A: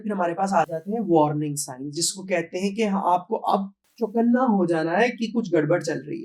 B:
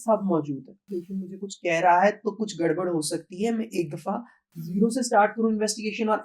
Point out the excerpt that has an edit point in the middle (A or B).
B